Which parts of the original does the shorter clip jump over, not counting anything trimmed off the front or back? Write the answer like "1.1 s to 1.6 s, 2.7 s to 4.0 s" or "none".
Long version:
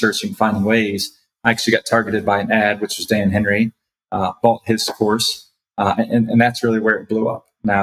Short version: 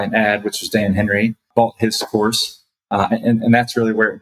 3.8 s to 4.3 s